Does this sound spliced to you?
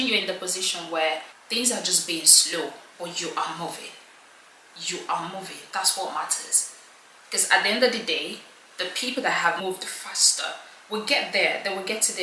yes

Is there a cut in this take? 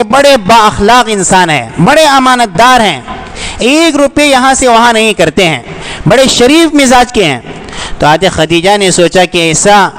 no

